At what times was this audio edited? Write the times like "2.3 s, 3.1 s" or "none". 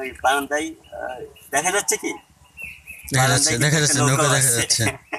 none